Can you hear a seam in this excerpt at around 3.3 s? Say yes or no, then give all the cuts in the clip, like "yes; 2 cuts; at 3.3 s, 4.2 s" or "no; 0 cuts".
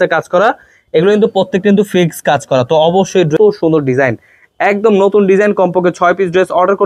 yes; 1 cut; at 3.3 s